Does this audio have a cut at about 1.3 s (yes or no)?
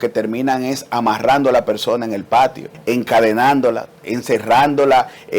no